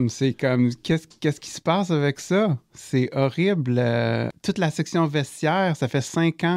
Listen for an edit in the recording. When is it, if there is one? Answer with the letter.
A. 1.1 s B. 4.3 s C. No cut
B